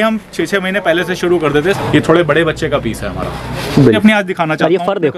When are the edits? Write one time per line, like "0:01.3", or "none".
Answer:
0:01.8
0:04.0